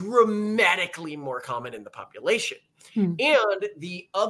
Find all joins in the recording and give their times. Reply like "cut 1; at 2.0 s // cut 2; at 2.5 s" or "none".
none